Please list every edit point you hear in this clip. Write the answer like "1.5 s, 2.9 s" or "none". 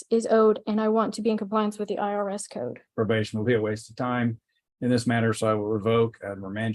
2.8 s